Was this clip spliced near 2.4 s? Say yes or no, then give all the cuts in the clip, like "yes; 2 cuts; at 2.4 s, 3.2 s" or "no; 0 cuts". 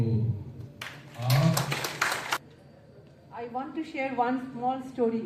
yes; 1 cut; at 2.4 s